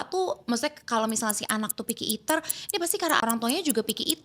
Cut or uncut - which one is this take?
cut